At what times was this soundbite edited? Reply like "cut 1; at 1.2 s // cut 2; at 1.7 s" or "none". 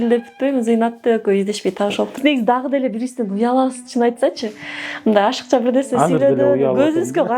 cut 1; at 2.2 s

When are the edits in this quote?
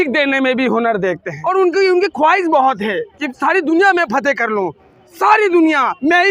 cut 1; at 1.3 s

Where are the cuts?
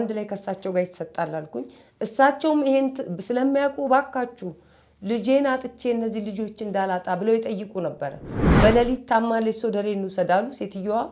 none

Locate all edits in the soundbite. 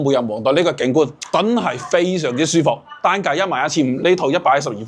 cut 1; at 1.2 s

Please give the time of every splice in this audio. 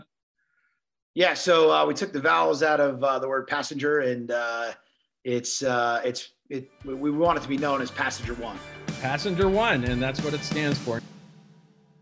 cut 1; at 11.0 s

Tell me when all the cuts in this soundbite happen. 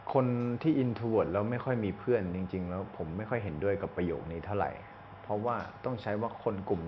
none

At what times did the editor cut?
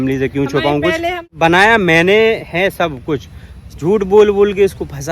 cut 1; at 1.3 s

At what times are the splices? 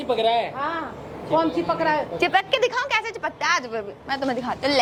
none

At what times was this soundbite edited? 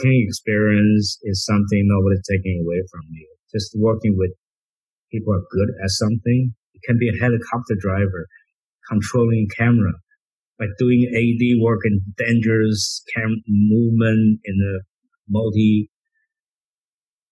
none

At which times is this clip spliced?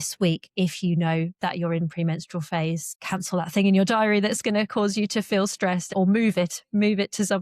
cut 1; at 2.9 s // cut 2; at 5.9 s

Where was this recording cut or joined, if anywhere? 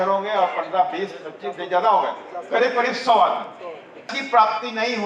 cut 1; at 4.1 s

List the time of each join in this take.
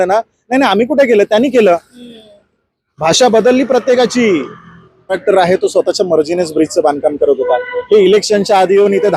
cut 1; at 5.2 s

